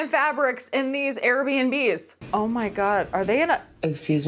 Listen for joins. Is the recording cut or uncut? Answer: cut